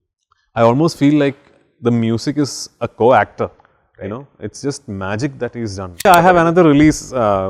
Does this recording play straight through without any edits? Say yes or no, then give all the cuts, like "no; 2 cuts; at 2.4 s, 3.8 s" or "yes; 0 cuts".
no; 1 cut; at 6.1 s